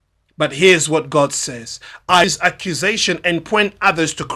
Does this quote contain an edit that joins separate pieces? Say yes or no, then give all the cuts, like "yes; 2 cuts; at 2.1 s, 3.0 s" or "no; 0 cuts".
yes; 1 cut; at 2.2 s